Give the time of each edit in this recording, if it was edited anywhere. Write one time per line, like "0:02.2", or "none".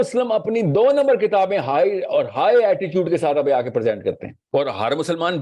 0:04.3